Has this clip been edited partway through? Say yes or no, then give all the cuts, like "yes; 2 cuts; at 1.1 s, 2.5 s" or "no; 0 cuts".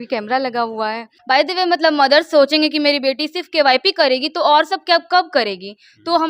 yes; 1 cut; at 1.1 s